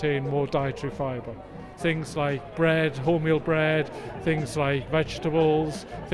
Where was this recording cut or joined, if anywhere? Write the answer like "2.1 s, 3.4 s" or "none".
1.7 s